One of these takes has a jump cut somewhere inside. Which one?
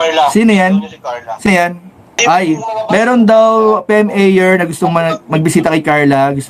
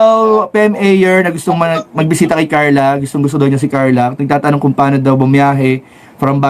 first; 1 cut; at 2.2 s

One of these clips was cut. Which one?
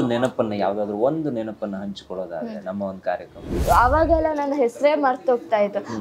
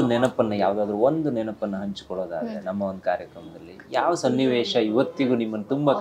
first; 1 cut; at 3.6 s

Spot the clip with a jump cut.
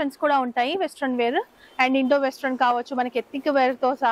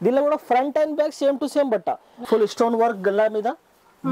second; 1 cut; at 2.2 s

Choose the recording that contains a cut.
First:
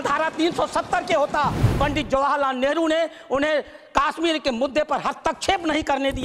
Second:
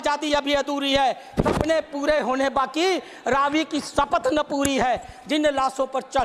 first; 1 cut; at 1.7 s

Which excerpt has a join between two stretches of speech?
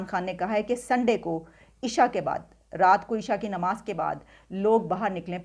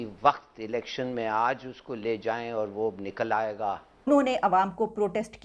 second; 1 cut; at 4.1 s

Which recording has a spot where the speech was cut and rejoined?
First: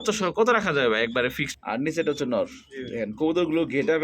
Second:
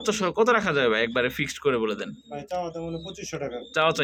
first; 1 cut; at 1.5 s

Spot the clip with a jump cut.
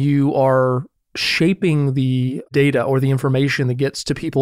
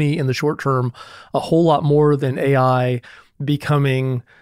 first; 1 cut; at 2.5 s

